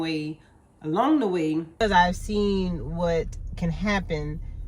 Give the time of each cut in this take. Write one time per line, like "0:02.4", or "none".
0:01.8